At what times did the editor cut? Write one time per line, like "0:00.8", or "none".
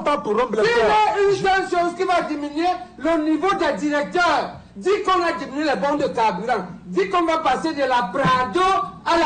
none